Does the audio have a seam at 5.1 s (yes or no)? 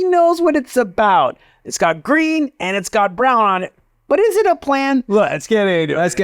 yes